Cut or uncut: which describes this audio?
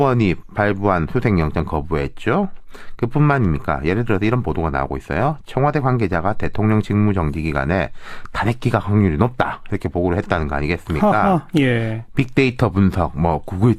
uncut